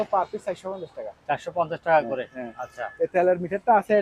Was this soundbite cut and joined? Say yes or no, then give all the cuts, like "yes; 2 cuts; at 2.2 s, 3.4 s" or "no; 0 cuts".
no; 0 cuts